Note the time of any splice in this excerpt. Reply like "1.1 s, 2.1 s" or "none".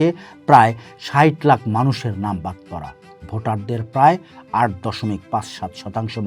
none